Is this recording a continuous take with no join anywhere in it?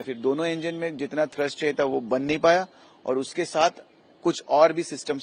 yes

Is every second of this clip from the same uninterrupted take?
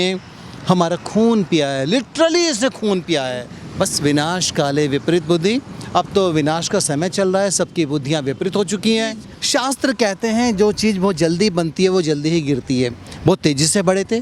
no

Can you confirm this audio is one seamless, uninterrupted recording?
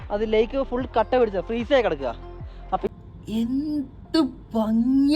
no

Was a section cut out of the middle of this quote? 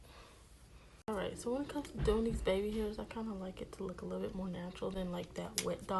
yes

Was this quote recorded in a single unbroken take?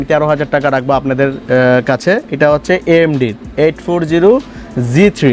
yes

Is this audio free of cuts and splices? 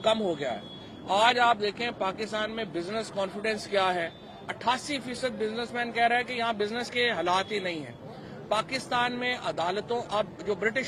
yes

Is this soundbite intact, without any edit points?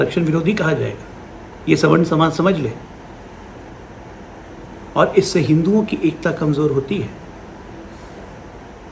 yes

